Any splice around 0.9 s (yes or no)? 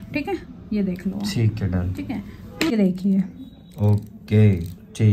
no